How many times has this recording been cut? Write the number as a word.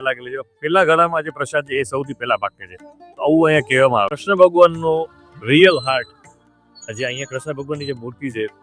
one